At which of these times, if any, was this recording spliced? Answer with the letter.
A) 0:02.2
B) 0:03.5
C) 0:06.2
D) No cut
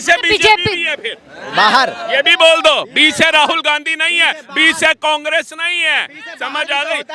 D